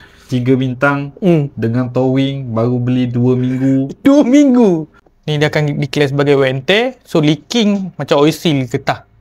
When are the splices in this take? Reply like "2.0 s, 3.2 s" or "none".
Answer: 4.9 s